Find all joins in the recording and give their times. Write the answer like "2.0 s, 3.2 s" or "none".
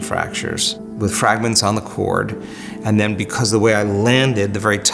0.9 s